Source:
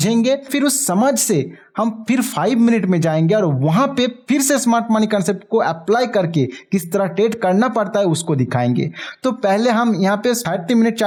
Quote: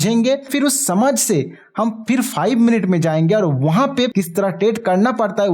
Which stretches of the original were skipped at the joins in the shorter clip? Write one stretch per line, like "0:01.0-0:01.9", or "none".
0:04.1-0:06.7